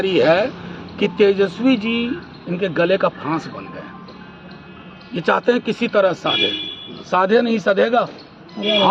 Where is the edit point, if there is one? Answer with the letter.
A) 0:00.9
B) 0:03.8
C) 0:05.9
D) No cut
D